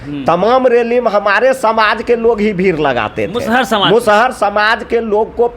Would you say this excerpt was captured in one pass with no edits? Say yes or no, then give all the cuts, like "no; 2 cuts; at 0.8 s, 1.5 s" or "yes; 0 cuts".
yes; 0 cuts